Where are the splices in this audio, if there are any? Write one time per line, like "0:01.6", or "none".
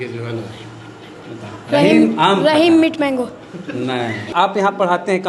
0:04.3